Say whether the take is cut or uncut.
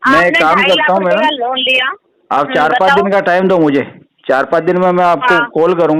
uncut